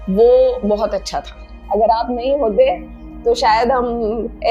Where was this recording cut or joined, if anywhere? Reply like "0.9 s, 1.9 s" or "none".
1.6 s